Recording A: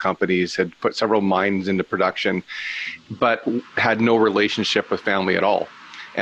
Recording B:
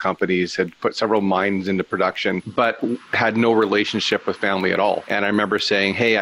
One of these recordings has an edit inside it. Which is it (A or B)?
B